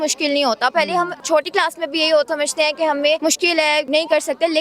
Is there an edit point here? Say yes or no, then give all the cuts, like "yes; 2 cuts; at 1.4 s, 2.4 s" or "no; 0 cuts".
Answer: yes; 3 cuts; at 1.2 s, 2.3 s, 3.6 s